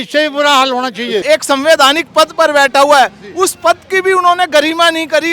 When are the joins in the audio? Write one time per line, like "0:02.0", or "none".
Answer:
0:01.2